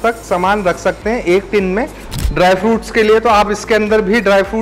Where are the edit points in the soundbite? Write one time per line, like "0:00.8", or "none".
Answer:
0:02.0